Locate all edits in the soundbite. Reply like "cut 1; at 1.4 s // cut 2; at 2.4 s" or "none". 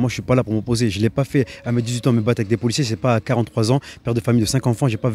none